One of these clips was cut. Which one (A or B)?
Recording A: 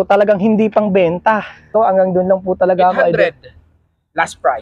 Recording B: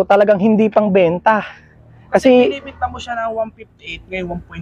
A